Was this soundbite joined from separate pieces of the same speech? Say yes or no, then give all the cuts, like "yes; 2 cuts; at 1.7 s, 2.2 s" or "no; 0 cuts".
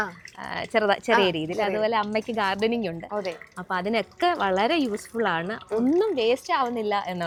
no; 0 cuts